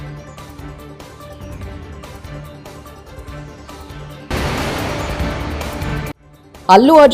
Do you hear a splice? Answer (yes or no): yes